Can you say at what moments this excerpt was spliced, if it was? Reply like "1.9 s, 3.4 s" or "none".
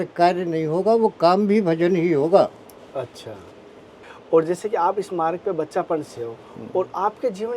none